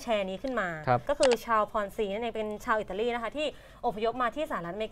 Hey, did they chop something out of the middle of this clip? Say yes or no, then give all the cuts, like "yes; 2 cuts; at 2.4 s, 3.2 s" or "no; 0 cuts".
yes; 1 cut; at 1.0 s